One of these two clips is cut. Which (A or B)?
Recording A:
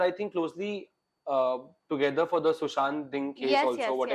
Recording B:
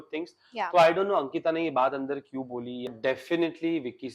B